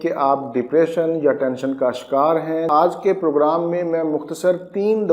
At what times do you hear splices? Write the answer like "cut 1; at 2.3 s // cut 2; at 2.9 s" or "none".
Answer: cut 1; at 2.7 s